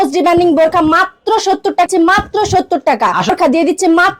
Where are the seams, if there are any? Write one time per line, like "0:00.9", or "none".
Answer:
0:01.9
0:03.3